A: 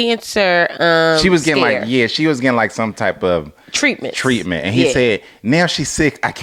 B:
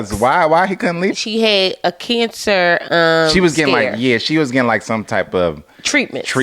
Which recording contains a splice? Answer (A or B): B